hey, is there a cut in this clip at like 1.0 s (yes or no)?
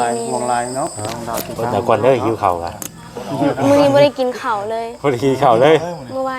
yes